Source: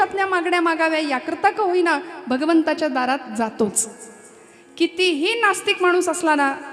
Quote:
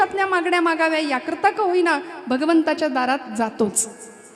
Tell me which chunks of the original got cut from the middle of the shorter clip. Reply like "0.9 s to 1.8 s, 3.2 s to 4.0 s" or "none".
none